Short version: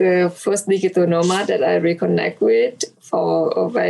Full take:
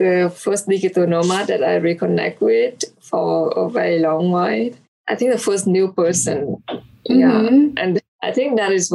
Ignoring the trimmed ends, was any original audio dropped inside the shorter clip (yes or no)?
no